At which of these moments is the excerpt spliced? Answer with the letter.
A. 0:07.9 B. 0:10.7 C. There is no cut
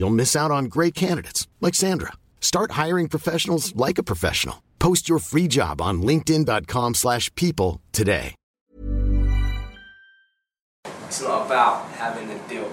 B